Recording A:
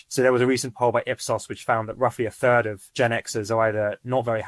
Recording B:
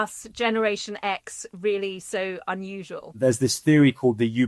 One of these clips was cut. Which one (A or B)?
B